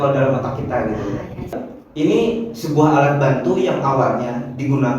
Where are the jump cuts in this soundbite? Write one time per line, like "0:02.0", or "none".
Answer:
0:01.7